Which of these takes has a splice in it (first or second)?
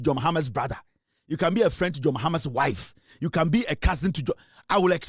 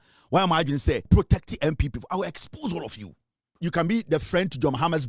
second